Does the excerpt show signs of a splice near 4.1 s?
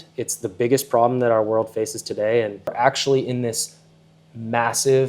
no; 1 cut; at 2.7 s

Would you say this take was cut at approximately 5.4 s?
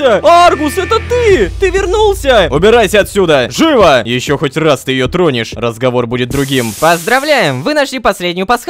no; 3 cuts; at 2.5 s, 4.1 s, 6.8 s

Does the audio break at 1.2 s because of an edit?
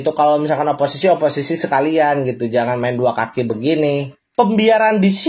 no; 1 cut; at 4.1 s

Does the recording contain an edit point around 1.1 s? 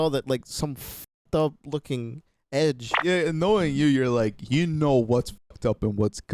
no; 1 cut; at 2.9 s

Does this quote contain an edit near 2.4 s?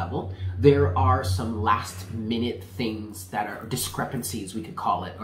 no; 0 cuts

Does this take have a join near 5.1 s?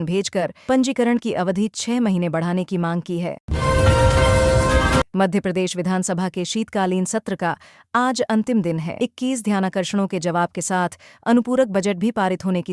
yes; 2 cuts; at 3.4 s, 5.1 s

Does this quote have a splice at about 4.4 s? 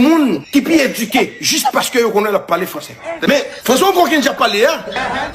no; 1 cut; at 3.1 s

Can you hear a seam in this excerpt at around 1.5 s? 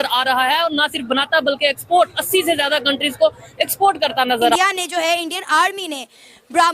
no; 1 cut; at 4.6 s

